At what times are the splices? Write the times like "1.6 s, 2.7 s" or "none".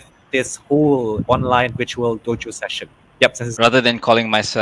3.4 s